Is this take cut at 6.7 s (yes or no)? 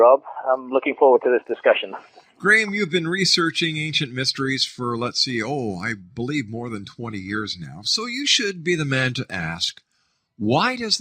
yes